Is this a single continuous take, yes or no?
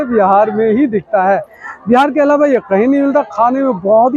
yes